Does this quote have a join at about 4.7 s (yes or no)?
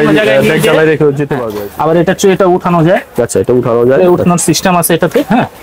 no